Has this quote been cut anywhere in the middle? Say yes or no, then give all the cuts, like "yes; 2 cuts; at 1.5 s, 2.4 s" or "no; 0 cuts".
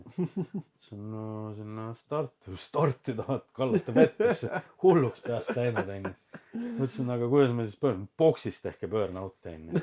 no; 0 cuts